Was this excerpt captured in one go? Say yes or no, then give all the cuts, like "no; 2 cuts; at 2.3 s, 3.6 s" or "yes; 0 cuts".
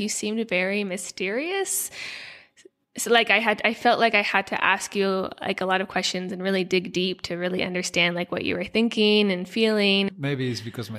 no; 1 cut; at 10.1 s